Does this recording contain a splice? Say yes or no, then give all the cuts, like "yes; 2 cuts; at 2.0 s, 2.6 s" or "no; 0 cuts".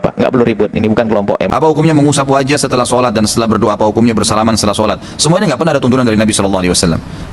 yes; 1 cut; at 1.5 s